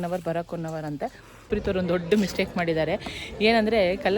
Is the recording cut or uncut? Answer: cut